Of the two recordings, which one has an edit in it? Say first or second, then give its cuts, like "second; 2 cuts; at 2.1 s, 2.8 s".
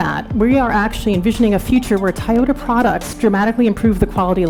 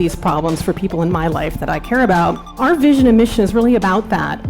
second; 1 cut; at 2.6 s